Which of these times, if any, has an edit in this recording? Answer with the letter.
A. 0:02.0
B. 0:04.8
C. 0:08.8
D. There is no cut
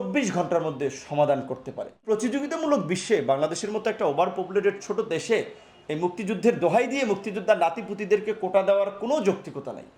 A